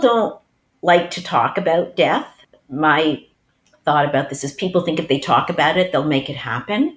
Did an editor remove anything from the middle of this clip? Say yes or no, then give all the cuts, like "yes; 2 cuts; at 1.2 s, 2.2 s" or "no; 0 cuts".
yes; 2 cuts; at 2.4 s, 3.3 s